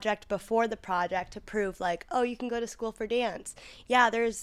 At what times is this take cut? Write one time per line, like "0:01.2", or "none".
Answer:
none

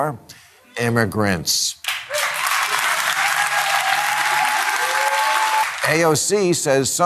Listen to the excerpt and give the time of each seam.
0:05.7

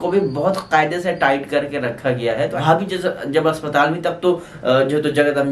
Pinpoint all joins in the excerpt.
0:02.6

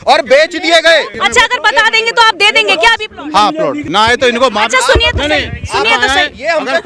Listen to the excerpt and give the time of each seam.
0:01.2
0:03.8

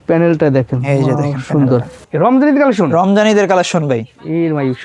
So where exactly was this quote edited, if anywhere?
0:02.0

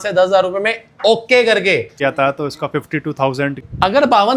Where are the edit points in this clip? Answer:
0:01.9
0:03.6

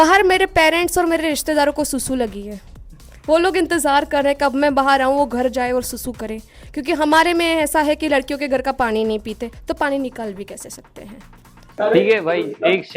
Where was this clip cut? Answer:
0:11.6

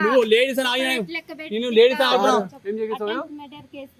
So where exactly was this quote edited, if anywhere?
0:02.6

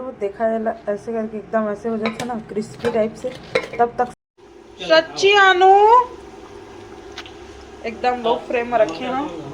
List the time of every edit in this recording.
0:04.1

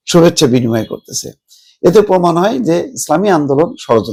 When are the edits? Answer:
none

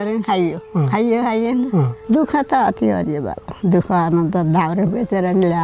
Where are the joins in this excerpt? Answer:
0:01.9

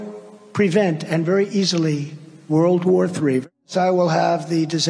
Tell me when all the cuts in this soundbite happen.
0:03.4

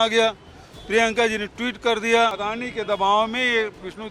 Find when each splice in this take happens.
0:02.4

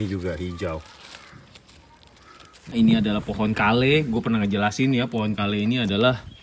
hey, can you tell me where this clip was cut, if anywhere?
0:02.7

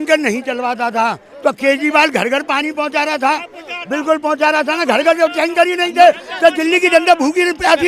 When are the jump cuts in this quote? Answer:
none

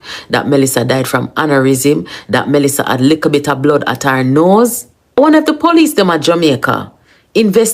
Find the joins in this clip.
0:05.2

